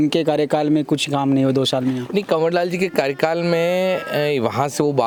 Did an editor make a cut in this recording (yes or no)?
no